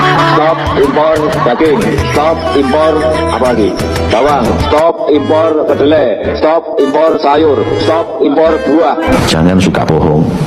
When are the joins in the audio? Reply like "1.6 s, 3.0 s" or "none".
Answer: 9.1 s